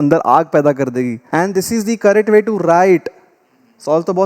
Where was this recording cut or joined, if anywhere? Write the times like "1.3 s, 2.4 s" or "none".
1.2 s